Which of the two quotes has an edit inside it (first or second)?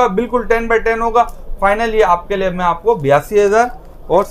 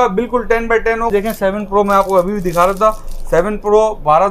second